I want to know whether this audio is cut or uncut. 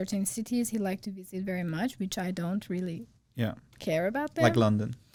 uncut